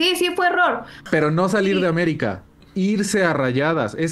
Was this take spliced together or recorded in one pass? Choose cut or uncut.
cut